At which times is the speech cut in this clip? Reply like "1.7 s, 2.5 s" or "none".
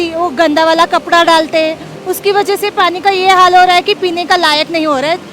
none